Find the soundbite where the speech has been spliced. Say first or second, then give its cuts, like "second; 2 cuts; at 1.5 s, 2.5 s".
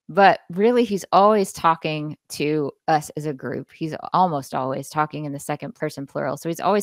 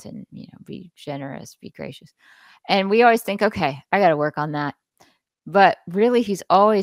first; 2 cuts; at 4.0 s, 5.7 s